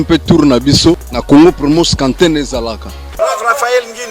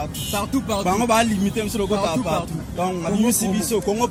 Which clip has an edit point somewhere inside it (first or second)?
first